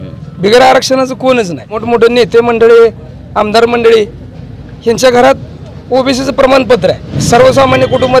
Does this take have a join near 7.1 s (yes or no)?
yes